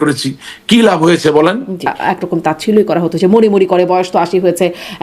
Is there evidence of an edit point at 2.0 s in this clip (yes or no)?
yes